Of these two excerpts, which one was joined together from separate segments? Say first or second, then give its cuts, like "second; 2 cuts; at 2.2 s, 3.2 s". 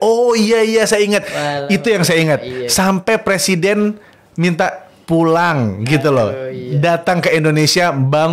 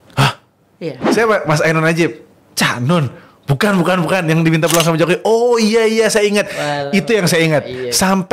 second; 1 cut; at 0.9 s